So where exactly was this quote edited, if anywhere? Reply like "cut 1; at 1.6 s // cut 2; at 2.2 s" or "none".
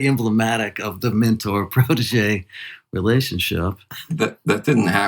cut 1; at 4.0 s

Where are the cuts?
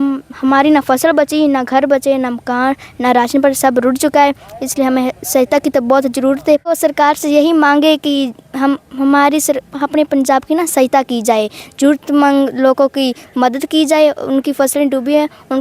cut 1; at 6.7 s

